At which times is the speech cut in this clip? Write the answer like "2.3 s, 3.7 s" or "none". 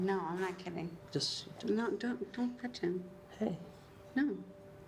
none